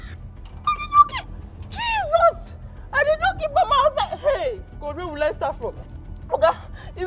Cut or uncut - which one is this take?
uncut